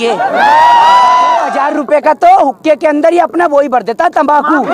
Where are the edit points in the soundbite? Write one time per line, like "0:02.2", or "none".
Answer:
0:01.5